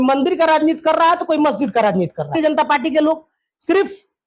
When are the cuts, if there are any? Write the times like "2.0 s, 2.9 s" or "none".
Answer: 2.3 s